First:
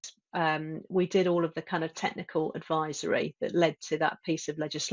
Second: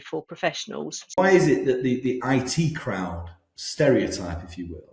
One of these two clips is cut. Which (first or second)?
second